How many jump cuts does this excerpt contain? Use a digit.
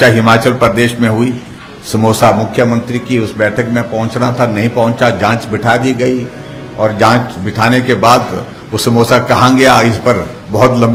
0